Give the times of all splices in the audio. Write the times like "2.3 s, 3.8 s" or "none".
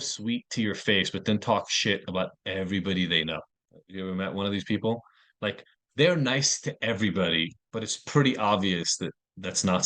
7.6 s